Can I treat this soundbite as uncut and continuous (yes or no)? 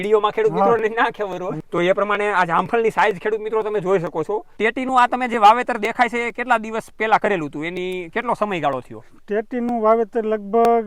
no